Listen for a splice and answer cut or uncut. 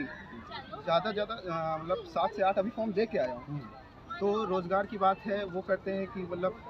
uncut